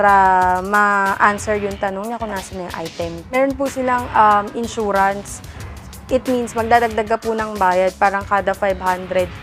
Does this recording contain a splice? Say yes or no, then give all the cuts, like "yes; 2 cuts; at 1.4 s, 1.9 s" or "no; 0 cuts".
no; 0 cuts